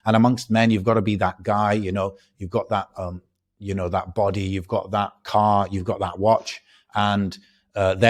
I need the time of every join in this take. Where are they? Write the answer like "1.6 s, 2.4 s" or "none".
none